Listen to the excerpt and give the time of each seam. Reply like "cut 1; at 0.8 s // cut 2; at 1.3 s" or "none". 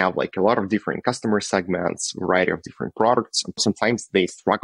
none